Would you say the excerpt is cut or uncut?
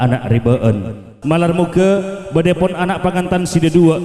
cut